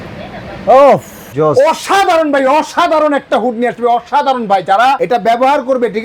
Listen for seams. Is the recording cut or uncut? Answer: cut